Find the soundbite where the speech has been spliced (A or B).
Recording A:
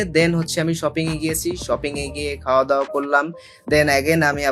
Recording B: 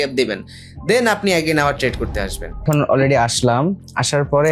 B